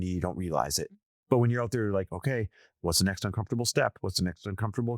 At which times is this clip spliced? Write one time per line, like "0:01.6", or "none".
0:01.0